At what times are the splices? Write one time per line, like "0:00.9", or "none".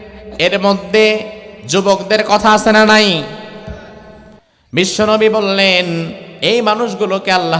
none